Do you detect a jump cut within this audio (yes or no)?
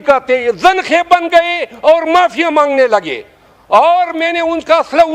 no